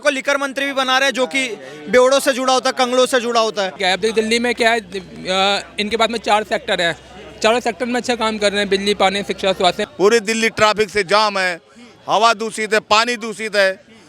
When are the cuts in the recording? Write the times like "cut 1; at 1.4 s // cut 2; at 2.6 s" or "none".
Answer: cut 1; at 3.8 s // cut 2; at 9.8 s